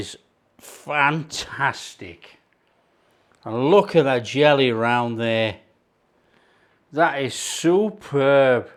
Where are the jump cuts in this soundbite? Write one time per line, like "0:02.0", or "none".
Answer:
none